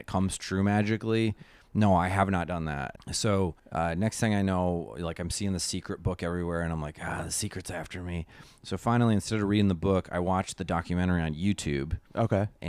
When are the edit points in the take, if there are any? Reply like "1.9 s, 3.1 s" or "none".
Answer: 2.9 s, 3.6 s